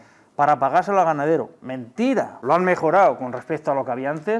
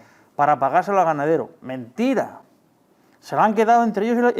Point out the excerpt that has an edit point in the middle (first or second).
first